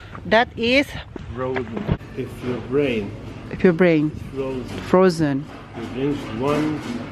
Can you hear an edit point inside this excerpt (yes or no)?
yes